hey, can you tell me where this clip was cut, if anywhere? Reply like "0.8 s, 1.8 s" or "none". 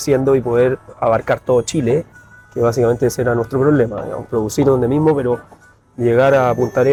none

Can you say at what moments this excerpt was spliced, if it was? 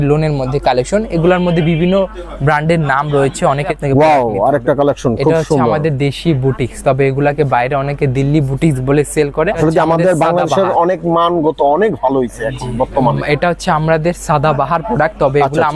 3.7 s, 9.6 s

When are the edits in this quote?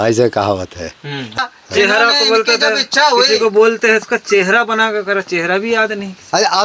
1.4 s

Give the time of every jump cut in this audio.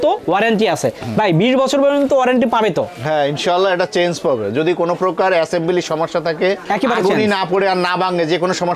none

